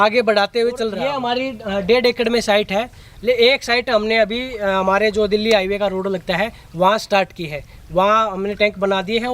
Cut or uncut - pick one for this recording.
cut